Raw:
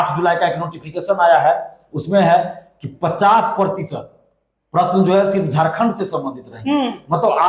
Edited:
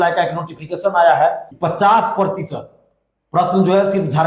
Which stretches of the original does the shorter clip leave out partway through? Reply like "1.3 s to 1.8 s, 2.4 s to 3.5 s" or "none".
1.7 s to 2.9 s